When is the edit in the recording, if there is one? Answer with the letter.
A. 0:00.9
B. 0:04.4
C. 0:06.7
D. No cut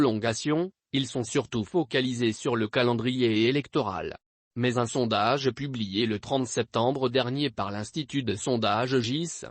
A